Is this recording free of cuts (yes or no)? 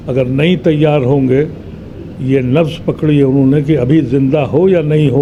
yes